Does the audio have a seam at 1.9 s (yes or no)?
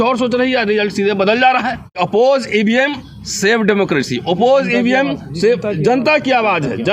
yes